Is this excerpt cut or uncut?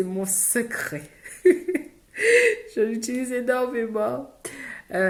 uncut